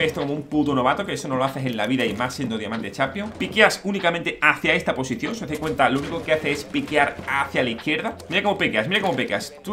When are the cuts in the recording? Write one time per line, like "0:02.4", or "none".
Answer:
0:03.3
0:08.2